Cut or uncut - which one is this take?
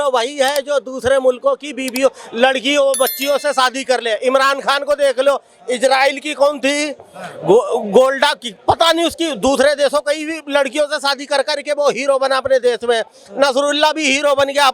uncut